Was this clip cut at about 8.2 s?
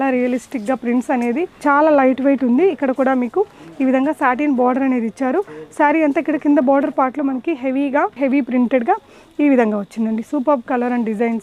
yes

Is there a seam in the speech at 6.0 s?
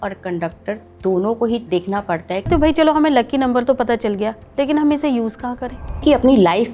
yes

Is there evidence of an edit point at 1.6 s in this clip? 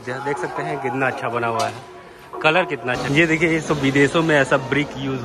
no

